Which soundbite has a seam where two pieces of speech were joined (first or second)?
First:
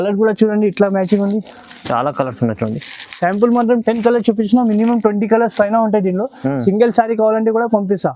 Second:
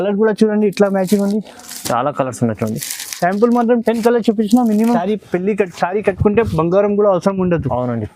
second